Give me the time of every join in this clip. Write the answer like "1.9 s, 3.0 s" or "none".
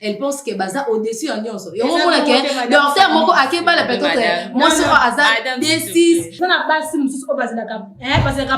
6.4 s